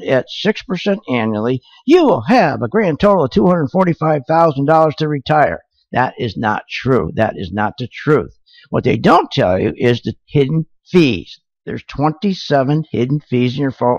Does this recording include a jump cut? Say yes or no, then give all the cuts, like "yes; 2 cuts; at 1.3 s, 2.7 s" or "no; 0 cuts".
no; 0 cuts